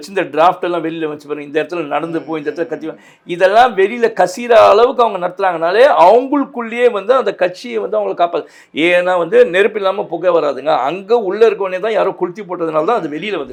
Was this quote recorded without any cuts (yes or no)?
yes